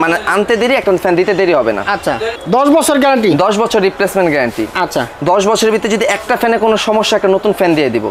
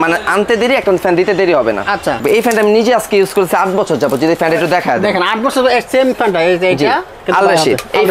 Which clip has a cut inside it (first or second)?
second